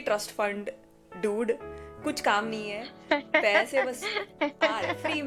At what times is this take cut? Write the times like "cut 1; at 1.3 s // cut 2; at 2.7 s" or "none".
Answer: none